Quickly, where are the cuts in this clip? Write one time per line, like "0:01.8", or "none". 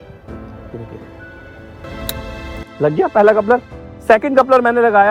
none